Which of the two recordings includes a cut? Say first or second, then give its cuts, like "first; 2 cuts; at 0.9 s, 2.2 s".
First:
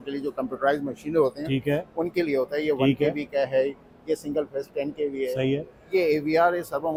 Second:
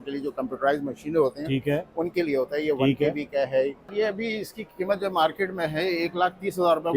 second; 1 cut; at 3.9 s